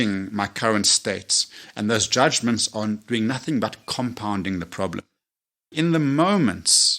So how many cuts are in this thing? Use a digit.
1